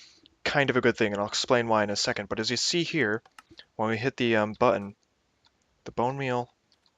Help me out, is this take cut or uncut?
cut